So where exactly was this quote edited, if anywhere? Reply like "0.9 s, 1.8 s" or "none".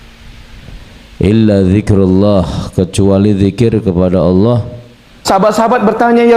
5.1 s